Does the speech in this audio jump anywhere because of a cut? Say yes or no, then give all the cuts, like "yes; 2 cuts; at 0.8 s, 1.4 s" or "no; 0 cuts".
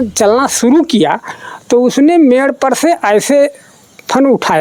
no; 0 cuts